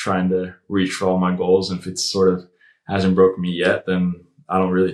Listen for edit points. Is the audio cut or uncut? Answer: uncut